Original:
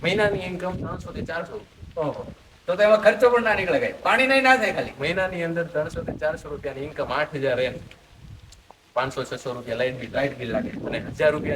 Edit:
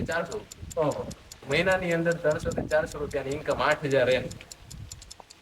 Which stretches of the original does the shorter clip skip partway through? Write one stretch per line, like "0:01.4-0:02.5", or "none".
0:02.6-0:04.9

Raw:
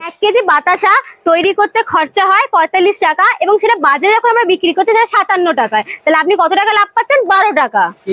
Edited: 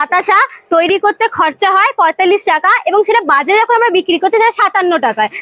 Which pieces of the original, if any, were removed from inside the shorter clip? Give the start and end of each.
none

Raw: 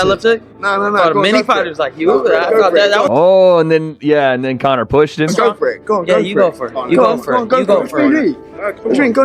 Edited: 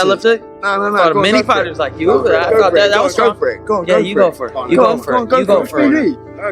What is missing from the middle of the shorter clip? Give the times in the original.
0:03.1-0:05.3

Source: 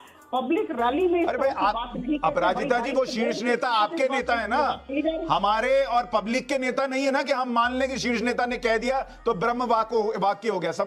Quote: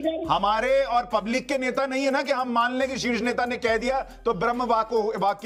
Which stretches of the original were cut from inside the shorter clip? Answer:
none

